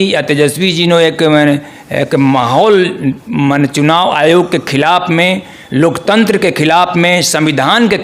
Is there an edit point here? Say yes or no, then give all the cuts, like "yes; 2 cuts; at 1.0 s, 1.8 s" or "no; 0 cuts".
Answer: no; 0 cuts